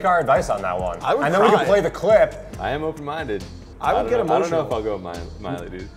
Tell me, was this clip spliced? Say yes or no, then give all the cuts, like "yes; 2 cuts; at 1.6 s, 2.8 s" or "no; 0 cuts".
yes; 1 cut; at 2.5 s